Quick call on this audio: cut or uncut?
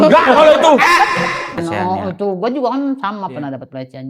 cut